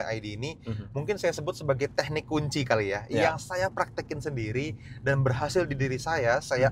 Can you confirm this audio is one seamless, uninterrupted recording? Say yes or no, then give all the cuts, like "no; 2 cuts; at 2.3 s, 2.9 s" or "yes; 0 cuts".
yes; 0 cuts